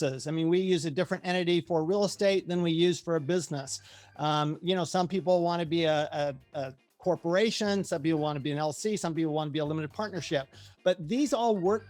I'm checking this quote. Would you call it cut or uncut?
uncut